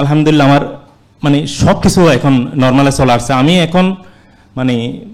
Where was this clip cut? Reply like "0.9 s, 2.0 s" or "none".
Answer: none